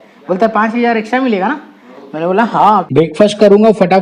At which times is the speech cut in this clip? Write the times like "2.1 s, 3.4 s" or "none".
2.8 s